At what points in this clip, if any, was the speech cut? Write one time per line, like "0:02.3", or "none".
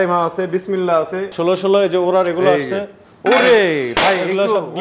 0:01.3